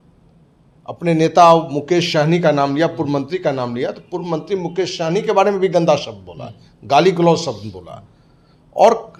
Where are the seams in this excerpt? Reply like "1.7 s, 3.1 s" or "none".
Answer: none